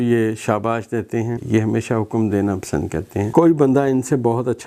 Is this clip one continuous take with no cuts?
no; 2 cuts; at 1.4 s, 3.3 s

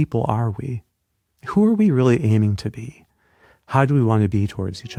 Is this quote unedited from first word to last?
yes; 0 cuts

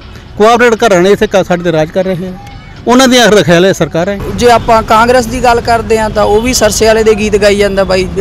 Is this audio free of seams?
no; 1 cut; at 4.2 s

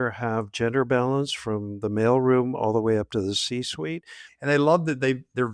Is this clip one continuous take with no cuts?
no; 1 cut; at 4.3 s

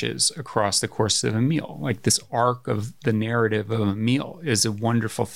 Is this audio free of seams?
yes; 0 cuts

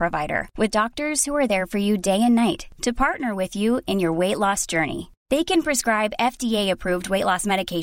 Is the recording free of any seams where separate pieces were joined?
yes; 0 cuts

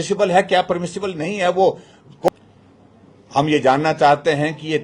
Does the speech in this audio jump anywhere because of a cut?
yes; 1 cut; at 2.3 s

